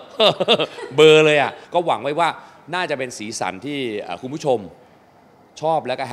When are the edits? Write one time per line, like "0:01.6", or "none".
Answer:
0:01.6